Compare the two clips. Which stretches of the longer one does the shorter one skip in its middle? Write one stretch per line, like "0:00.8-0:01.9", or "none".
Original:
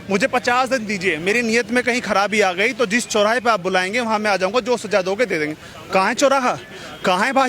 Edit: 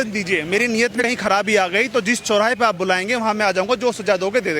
0:01.7-0:01.8